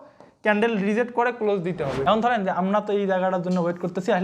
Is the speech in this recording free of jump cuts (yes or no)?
no